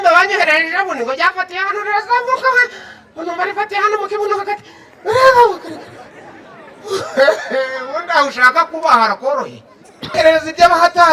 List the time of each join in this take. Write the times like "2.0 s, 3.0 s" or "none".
10.2 s